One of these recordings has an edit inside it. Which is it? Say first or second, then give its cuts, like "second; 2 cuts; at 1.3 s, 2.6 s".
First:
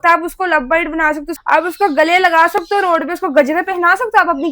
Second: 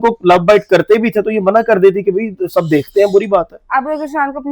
first; 1 cut; at 1.3 s